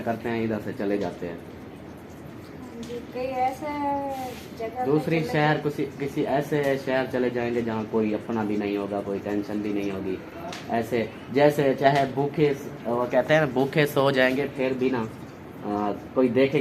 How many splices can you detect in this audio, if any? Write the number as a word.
zero